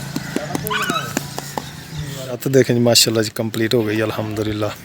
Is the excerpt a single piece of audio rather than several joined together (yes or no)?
no